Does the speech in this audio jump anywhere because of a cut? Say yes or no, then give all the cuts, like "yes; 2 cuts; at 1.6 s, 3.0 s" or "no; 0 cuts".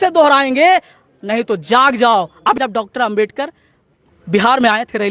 yes; 1 cut; at 2.6 s